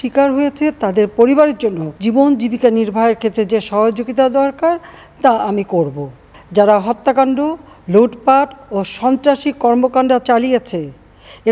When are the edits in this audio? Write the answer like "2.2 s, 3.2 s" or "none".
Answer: 1.9 s, 6.2 s